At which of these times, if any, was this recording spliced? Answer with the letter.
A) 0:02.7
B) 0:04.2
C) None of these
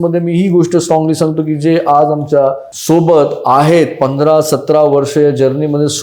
A